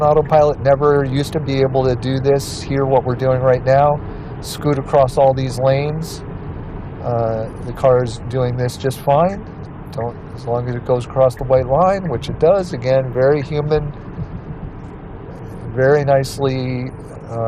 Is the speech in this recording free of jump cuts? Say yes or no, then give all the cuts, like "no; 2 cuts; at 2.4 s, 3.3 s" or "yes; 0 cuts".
yes; 0 cuts